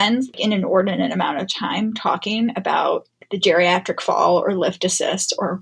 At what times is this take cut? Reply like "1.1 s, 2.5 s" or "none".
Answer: none